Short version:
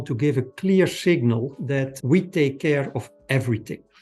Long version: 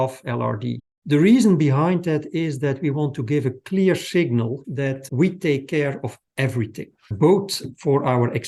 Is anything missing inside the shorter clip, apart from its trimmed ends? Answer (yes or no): no